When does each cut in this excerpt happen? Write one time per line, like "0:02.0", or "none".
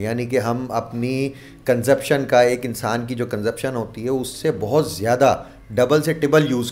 none